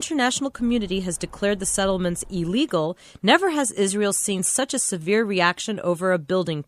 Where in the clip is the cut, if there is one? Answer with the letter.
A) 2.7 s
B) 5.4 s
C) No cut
B